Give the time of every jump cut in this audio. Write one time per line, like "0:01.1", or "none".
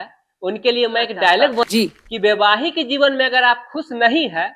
0:01.6